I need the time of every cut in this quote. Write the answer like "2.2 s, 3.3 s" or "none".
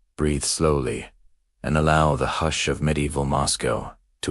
2.9 s